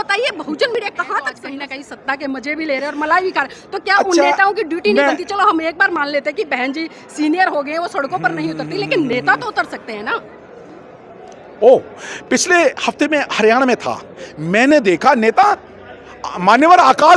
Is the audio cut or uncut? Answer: cut